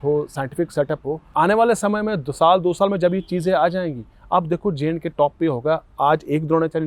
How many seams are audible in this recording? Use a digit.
1